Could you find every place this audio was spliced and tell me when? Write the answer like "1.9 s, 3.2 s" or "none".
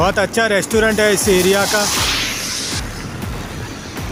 none